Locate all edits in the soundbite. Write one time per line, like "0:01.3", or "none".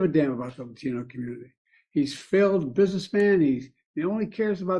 none